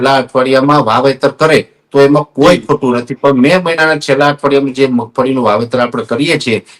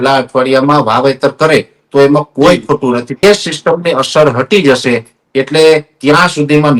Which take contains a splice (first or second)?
second